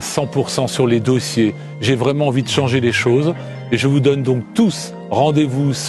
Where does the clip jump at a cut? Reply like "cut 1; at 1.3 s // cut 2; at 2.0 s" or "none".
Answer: none